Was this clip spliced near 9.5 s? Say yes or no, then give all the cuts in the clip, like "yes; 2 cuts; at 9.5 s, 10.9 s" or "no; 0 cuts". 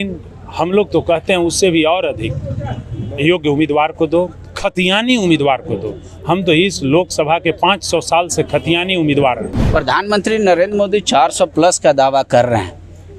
yes; 1 cut; at 9.5 s